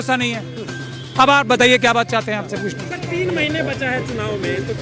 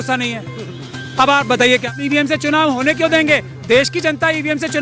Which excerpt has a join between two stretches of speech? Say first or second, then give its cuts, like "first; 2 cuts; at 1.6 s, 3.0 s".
second; 1 cut; at 1.9 s